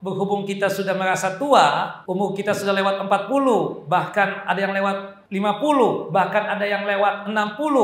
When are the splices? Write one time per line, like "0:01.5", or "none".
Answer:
0:02.0
0:05.2